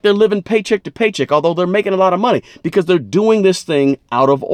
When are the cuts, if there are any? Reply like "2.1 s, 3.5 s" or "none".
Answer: none

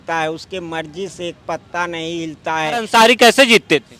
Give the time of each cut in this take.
2.8 s

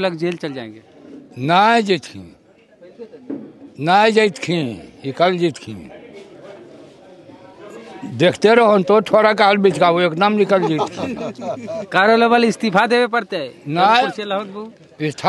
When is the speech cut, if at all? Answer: none

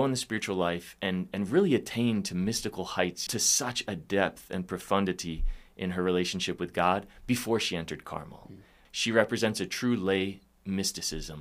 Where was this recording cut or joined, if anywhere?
3.2 s, 8.8 s

